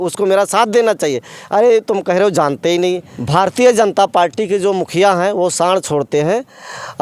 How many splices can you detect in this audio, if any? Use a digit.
1